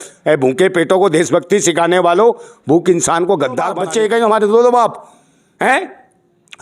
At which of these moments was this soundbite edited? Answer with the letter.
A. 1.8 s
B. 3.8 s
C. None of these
B